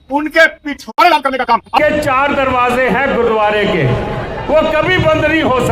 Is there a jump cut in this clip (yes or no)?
yes